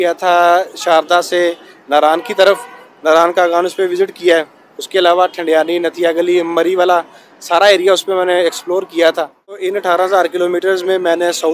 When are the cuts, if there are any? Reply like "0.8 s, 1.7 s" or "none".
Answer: 9.6 s